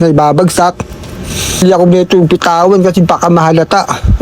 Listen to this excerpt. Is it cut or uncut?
cut